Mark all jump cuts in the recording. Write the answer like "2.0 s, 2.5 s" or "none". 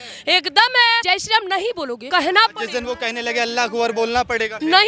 1.0 s, 2.0 s